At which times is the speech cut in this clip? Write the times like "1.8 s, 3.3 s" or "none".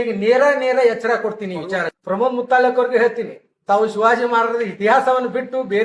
1.9 s